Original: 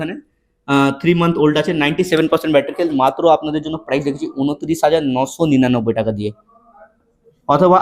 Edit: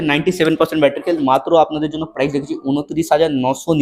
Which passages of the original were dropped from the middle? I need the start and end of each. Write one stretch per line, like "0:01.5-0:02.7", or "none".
none